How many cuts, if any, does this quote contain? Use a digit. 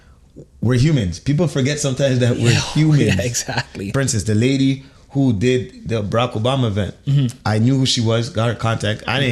1